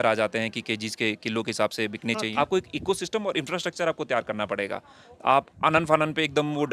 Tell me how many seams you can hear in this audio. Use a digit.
1